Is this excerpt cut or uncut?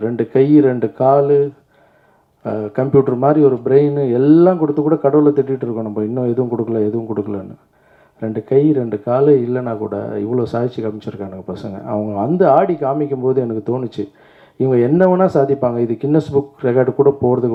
uncut